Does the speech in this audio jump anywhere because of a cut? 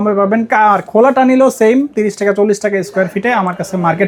no; 0 cuts

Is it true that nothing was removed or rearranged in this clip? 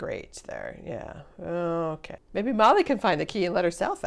yes; 0 cuts

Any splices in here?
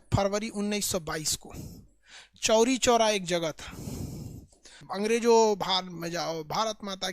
yes; 1 cut; at 4.8 s

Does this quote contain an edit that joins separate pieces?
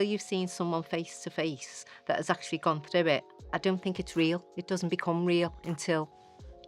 yes; 1 cut; at 3.4 s

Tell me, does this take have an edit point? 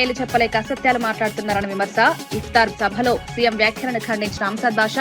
no; 0 cuts

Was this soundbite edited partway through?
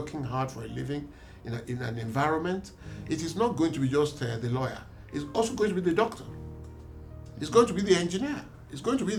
no; 0 cuts

